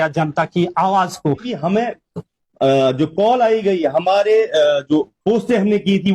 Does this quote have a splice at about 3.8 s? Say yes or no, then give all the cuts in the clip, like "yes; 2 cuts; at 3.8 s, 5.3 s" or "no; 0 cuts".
no; 1 cut; at 1.5 s